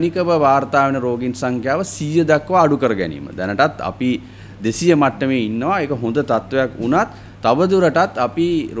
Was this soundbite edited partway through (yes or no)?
no